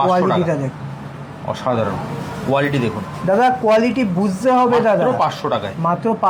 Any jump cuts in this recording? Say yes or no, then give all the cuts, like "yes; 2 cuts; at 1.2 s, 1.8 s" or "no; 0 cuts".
no; 0 cuts